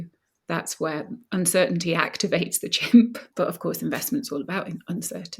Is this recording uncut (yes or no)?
no